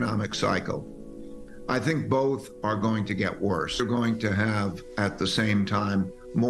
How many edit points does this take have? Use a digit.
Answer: 1